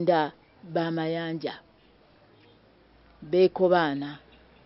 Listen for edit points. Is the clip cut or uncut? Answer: uncut